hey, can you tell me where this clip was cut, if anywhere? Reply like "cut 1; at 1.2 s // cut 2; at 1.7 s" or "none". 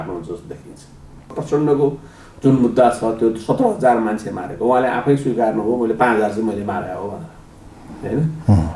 cut 1; at 1.4 s